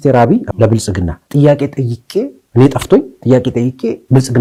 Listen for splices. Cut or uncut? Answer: uncut